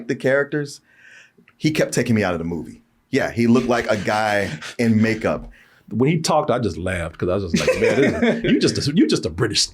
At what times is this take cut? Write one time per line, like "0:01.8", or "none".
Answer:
0:05.6